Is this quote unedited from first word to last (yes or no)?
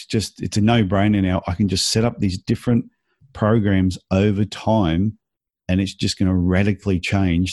yes